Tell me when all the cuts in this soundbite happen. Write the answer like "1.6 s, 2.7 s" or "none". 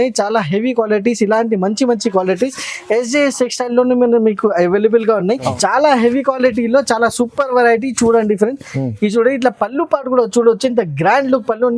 5.5 s